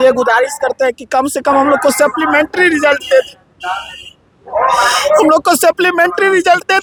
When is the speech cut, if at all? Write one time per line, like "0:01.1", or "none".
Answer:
none